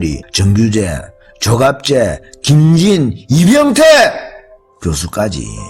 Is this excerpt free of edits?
yes; 0 cuts

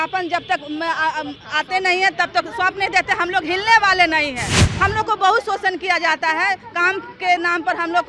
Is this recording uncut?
yes; 0 cuts

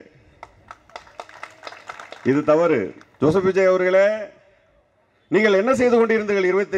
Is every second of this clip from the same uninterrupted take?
no; 1 cut; at 3.0 s

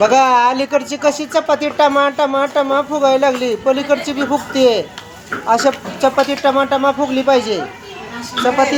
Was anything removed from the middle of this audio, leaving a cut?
no; 0 cuts

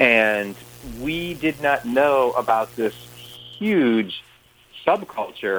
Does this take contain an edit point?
no; 0 cuts

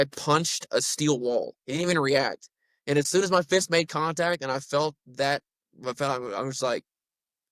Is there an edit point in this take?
yes; 1 cut; at 1.6 s

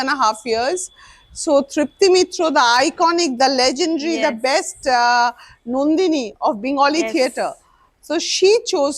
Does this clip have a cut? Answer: no; 0 cuts

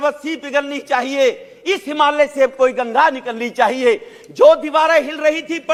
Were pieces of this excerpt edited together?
no; 0 cuts

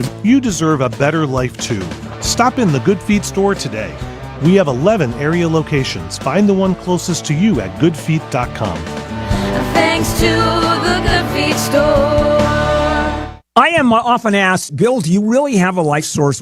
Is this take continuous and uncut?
no; 1 cut; at 13.3 s

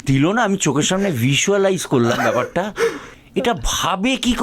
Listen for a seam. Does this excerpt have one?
no; 0 cuts

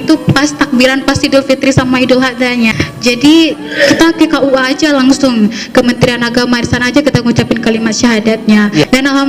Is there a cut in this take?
yes; 1 cut; at 3.6 s

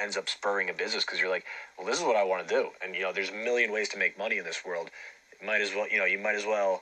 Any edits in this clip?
no; 0 cuts

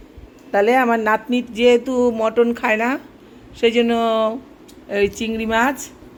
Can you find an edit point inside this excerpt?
no; 0 cuts

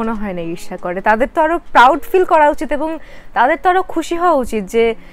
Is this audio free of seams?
yes; 0 cuts

